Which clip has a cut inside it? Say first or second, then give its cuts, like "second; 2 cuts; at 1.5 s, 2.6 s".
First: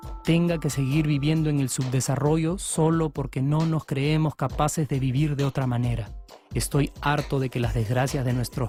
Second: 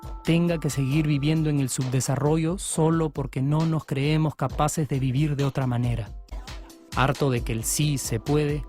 second; 1 cut; at 6.4 s